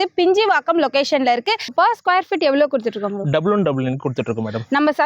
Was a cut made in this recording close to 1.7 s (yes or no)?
yes